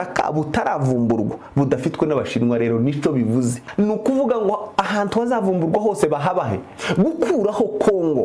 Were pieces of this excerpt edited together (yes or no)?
yes